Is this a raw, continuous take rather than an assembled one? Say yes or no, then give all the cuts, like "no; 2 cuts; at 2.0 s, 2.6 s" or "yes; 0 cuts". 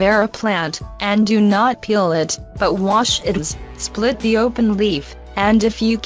yes; 0 cuts